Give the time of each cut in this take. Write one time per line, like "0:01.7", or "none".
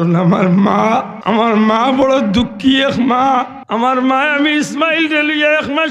0:01.1
0:03.6